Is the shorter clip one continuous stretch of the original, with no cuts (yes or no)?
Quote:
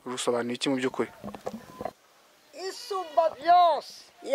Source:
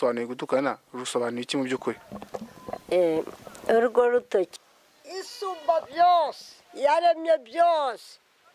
no